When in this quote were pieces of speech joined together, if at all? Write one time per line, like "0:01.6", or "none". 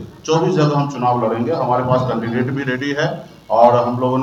none